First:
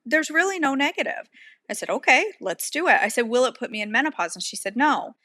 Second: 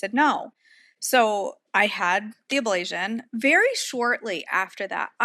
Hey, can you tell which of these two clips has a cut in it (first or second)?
second